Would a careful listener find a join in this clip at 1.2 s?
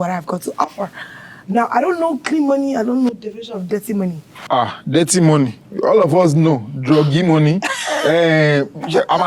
no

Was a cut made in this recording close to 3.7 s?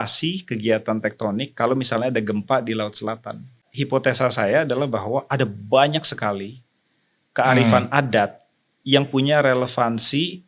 yes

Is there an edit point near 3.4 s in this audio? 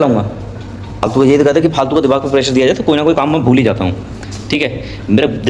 no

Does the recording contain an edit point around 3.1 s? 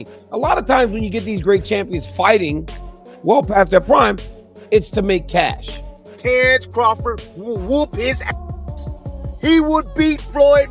no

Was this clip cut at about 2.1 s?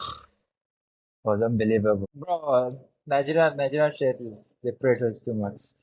yes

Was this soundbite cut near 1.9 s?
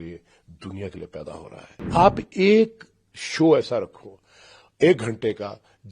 yes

